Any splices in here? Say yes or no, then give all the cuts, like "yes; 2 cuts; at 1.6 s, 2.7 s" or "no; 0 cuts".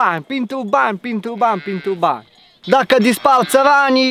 yes; 1 cut; at 2.6 s